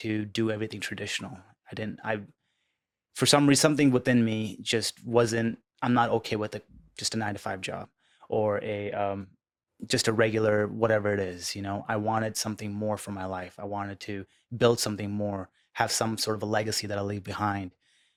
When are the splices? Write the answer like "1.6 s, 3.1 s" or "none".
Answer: none